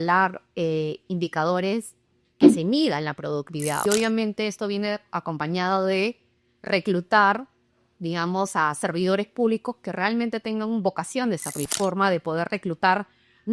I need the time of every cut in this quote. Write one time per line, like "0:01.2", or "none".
0:03.8
0:11.7